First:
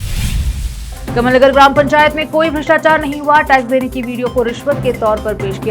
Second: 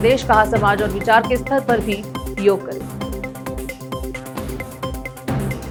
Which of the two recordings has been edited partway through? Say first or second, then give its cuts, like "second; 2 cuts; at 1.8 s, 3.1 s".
first; 1 cut; at 0.9 s